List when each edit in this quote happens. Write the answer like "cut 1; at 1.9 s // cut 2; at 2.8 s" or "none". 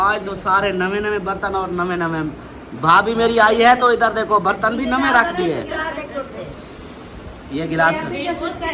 none